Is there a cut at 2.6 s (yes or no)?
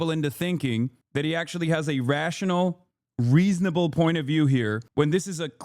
no